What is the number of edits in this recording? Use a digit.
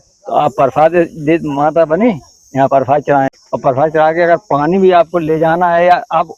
1